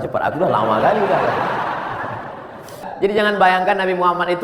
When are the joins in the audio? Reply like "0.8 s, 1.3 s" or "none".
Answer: 2.9 s